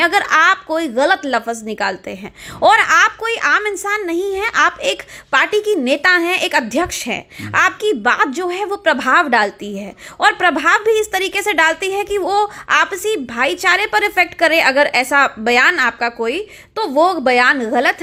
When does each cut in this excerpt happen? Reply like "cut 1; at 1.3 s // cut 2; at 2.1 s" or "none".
none